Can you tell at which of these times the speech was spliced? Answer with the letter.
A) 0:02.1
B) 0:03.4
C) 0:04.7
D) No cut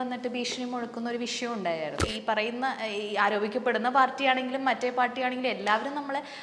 A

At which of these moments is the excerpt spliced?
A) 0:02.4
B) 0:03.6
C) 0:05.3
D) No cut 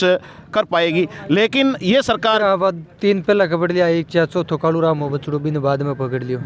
A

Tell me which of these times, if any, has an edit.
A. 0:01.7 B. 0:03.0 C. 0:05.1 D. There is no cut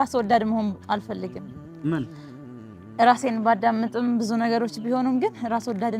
D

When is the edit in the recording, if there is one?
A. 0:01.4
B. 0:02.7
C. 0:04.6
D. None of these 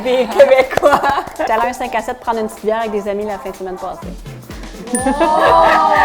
A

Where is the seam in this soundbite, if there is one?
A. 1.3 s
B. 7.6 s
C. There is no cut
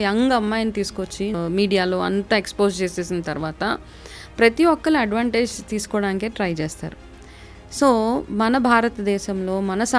A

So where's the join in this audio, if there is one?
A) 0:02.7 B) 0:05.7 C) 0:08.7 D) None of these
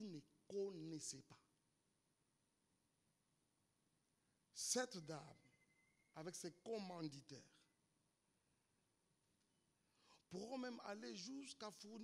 A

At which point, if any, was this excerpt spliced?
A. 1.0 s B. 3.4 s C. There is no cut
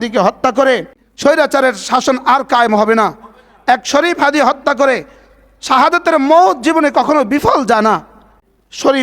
A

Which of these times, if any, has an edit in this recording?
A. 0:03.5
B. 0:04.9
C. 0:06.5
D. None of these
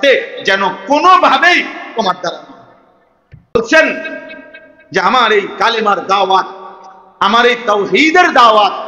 A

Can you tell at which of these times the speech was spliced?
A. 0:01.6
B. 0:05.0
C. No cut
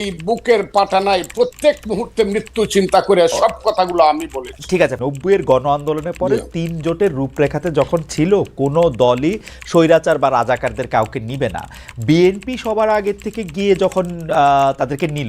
B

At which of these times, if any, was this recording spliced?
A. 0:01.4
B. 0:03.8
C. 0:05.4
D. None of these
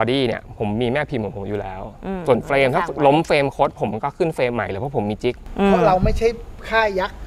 C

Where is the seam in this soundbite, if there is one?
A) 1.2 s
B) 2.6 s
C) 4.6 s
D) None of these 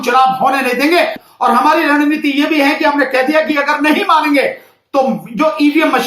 A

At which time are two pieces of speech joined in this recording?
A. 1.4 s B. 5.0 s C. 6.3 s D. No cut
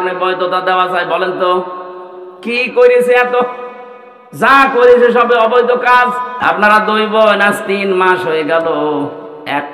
C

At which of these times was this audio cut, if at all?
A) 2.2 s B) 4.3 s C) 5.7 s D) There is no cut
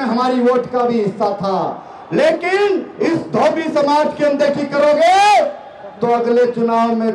D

